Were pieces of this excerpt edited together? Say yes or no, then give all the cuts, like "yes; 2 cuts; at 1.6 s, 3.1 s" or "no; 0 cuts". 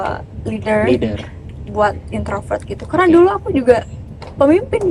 no; 0 cuts